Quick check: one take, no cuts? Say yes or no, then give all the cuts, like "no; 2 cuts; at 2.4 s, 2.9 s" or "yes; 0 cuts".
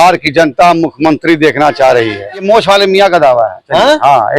no; 1 cut; at 2.4 s